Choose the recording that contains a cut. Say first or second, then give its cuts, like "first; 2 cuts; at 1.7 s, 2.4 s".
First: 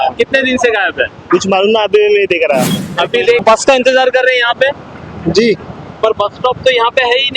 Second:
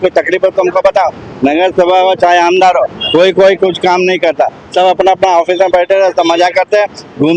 first; 1 cut; at 3.4 s